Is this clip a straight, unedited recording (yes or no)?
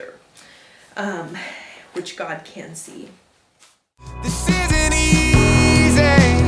no